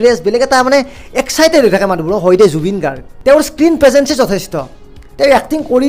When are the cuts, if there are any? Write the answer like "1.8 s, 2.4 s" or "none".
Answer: none